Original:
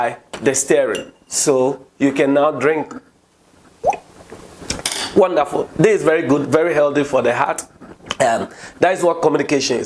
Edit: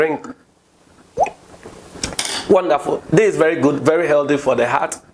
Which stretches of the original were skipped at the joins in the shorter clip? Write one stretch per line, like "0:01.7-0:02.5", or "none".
none